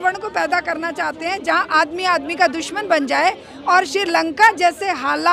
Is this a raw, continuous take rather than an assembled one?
yes; 0 cuts

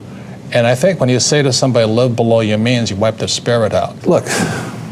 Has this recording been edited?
yes; 1 cut; at 4.0 s

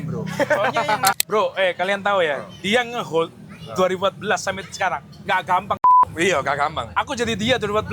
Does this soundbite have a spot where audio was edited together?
yes; 1 cut; at 1.2 s

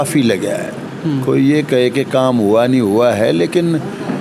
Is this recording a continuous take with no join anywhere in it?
yes; 0 cuts

